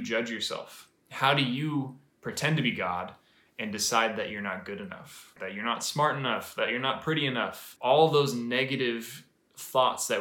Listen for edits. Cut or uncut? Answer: cut